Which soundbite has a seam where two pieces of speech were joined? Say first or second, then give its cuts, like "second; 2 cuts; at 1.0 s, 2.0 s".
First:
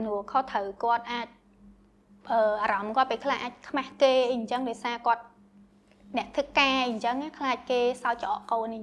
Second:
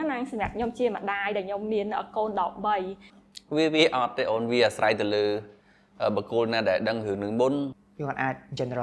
second; 2 cuts; at 3.0 s, 7.8 s